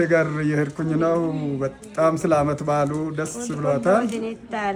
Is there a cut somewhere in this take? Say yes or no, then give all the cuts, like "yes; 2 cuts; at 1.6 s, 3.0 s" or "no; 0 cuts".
no; 0 cuts